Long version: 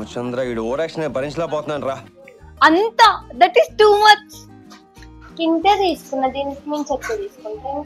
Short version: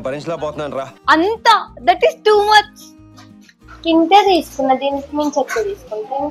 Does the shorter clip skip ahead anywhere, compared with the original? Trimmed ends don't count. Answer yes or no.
yes